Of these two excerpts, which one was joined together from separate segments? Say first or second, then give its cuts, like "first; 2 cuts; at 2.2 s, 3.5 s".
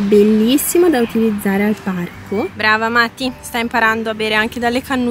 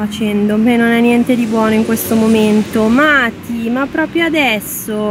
first; 1 cut; at 2.5 s